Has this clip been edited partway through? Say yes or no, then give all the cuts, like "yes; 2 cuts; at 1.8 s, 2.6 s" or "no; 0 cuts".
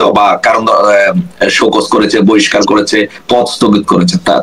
no; 0 cuts